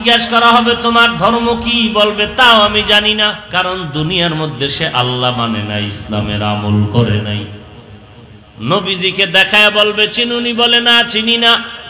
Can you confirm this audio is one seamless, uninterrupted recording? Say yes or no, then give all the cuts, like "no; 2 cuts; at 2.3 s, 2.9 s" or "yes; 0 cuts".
no; 1 cut; at 3.4 s